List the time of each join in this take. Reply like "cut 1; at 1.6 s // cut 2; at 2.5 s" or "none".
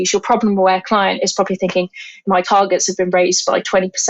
cut 1; at 2.3 s